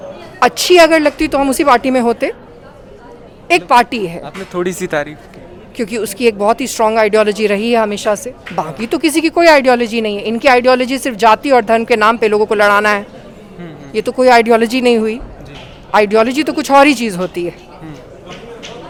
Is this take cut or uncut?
uncut